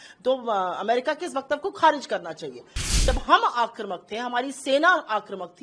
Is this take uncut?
no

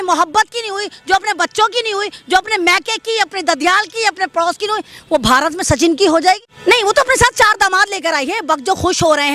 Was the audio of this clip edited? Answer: yes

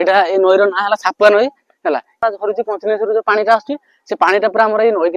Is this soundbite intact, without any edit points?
no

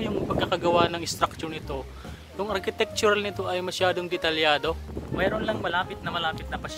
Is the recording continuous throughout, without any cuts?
no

